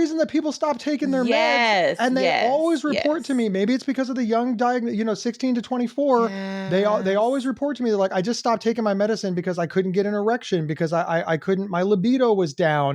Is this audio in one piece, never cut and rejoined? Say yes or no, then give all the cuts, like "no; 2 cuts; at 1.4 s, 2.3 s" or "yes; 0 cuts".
yes; 0 cuts